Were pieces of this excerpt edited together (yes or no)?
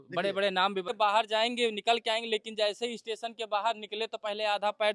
yes